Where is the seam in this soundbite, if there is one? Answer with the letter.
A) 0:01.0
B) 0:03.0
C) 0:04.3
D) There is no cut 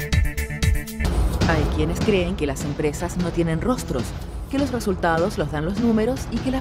A